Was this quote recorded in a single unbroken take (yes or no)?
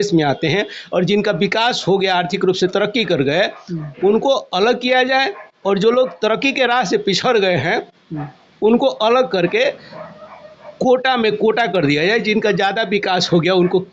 yes